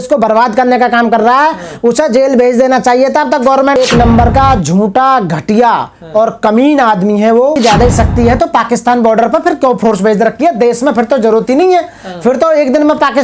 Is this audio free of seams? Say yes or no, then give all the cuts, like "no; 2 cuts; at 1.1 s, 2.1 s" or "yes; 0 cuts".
no; 2 cuts; at 3.8 s, 7.6 s